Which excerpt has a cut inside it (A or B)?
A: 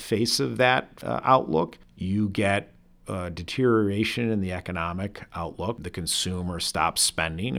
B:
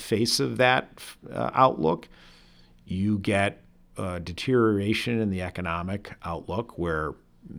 A